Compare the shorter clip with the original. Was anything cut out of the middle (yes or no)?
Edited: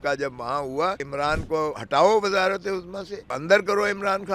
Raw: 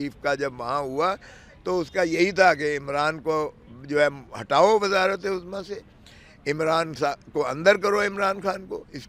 yes